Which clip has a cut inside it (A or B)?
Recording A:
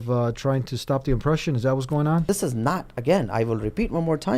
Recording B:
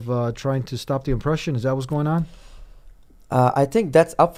A